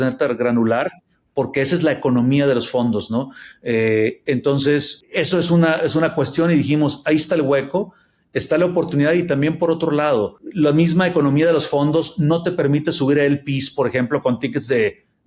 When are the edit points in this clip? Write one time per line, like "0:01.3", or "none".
none